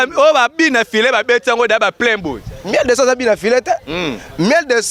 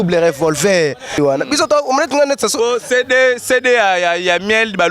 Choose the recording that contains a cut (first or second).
second